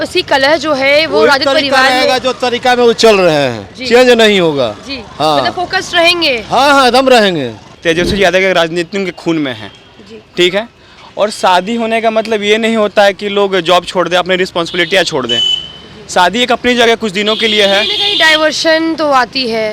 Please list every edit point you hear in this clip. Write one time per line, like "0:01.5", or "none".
0:07.7